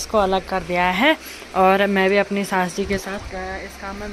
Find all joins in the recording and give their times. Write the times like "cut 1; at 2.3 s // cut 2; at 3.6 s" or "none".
none